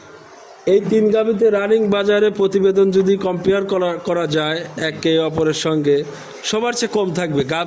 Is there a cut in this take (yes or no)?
no